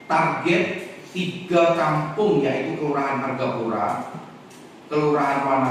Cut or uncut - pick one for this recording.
uncut